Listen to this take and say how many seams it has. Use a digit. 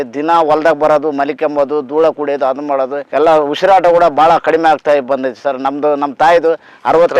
1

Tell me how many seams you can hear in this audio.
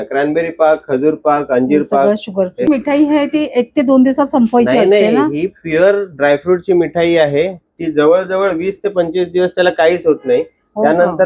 1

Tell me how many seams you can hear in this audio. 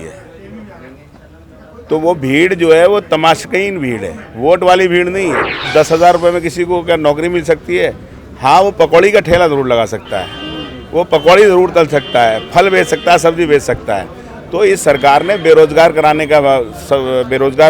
1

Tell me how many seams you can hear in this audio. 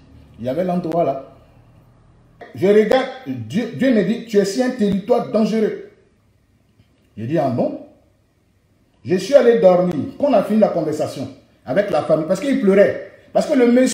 1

